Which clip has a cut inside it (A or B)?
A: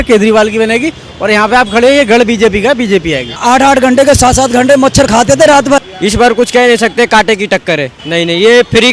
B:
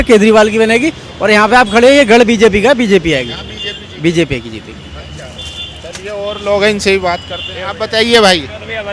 A